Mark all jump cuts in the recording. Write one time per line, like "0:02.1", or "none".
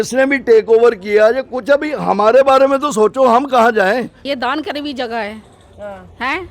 0:04.2